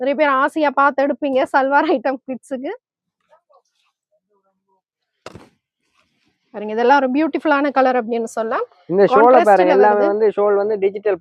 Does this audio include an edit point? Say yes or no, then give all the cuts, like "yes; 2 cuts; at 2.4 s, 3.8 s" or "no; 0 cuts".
no; 0 cuts